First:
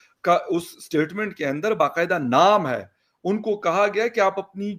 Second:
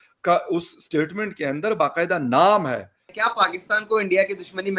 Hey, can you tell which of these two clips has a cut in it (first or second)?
second